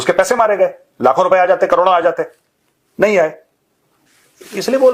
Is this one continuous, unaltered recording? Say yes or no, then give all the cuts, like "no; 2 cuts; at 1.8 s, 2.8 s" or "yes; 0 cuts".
yes; 0 cuts